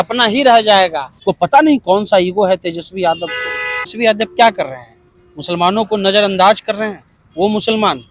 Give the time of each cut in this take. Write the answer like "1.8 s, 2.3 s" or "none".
1.2 s, 3.9 s